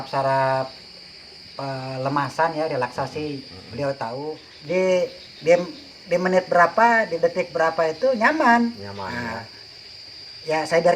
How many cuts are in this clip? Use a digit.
1